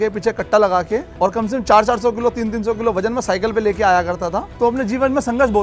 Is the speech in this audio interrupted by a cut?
yes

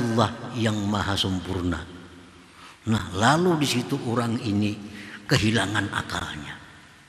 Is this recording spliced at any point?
no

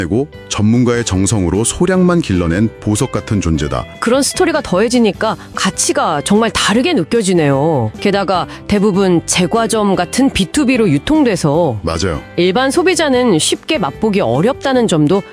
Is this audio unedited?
no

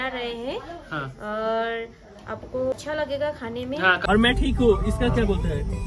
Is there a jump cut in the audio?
yes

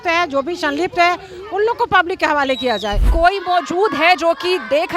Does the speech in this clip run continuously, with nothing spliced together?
no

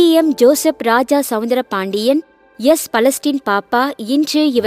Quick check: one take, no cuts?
yes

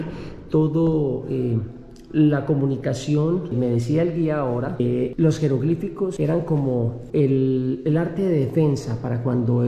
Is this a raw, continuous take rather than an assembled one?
yes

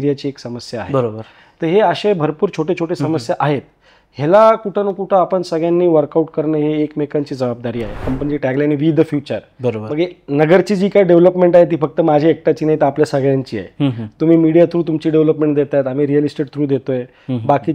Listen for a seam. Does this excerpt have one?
yes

